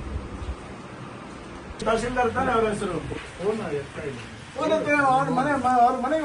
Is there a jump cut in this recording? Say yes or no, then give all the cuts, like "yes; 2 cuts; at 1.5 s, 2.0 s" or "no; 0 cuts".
no; 0 cuts